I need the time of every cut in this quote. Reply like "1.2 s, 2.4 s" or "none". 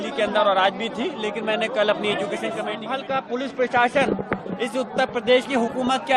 2.9 s